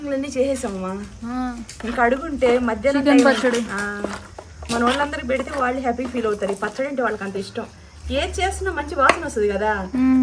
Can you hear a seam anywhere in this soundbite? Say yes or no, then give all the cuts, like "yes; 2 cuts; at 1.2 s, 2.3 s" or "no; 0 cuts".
no; 0 cuts